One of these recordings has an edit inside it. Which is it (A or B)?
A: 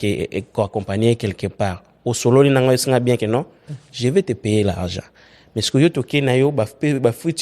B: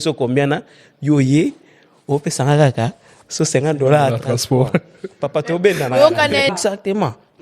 B